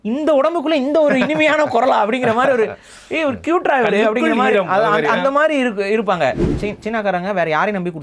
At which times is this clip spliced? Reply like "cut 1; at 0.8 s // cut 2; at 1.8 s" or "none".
cut 1; at 6.5 s